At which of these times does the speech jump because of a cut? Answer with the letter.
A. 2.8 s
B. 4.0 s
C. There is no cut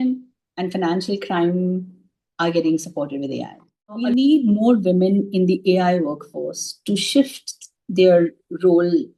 B